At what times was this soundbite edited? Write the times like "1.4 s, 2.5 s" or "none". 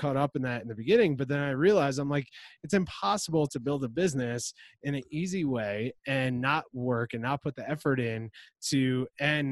none

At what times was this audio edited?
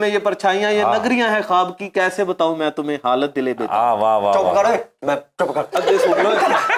none

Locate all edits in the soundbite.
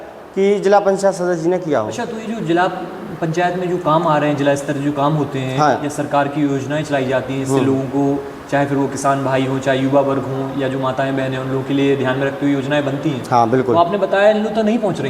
none

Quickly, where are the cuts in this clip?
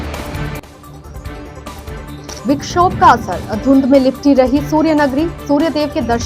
1.9 s

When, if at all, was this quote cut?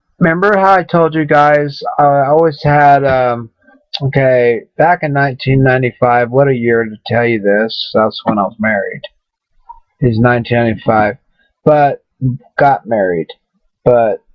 none

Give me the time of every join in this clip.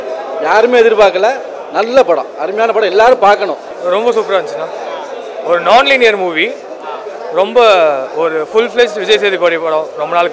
none

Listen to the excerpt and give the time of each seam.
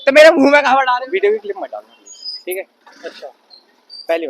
1.0 s

